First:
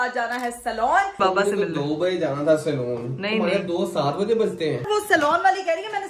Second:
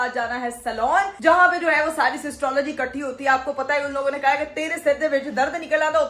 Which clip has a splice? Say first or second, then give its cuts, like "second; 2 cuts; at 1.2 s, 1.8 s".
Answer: first; 2 cuts; at 1.2 s, 4.8 s